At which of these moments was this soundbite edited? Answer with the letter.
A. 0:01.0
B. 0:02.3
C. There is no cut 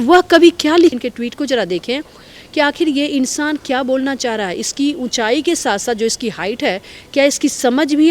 A